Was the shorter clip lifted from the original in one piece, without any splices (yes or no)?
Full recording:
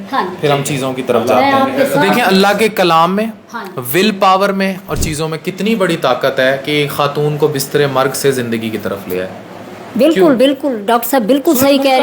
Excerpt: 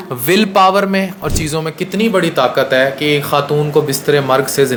yes